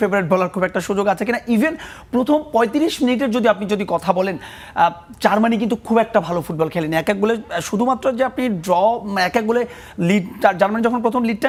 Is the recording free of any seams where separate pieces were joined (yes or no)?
yes